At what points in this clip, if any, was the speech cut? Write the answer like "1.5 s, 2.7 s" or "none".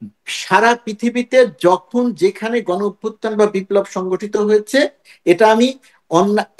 none